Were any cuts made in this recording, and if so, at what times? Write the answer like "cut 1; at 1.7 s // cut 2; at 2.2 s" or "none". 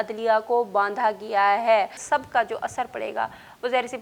cut 1; at 2.0 s